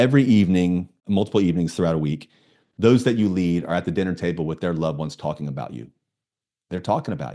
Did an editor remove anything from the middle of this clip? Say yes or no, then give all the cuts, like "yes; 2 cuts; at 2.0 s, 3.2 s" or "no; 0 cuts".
yes; 1 cut; at 0.9 s